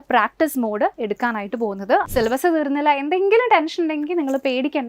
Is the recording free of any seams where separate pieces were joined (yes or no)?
no